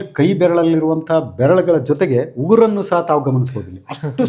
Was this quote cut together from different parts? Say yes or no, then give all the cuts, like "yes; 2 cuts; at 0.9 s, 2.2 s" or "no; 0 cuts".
no; 0 cuts